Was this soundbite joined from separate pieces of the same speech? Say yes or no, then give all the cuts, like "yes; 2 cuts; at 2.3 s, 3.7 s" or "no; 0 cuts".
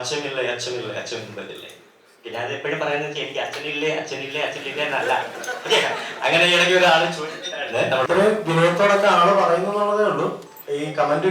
yes; 1 cut; at 8.0 s